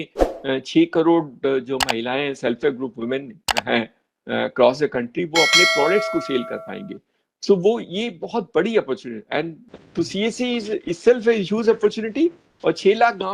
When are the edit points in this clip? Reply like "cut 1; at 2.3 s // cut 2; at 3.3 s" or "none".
cut 1; at 9.6 s